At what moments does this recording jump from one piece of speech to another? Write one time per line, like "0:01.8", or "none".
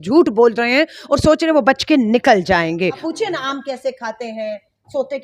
0:03.0